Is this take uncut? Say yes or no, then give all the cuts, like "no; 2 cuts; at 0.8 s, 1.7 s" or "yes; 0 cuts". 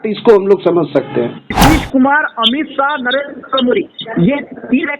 no; 1 cut; at 1.6 s